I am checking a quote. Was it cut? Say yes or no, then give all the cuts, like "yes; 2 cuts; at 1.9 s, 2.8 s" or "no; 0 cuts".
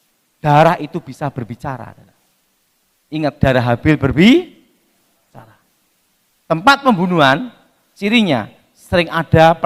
no; 0 cuts